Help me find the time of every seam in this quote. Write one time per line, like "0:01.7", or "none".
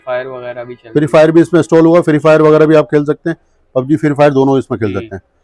none